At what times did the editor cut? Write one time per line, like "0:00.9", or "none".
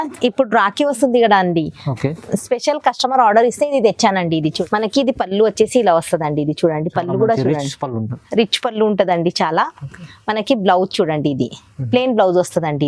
0:04.5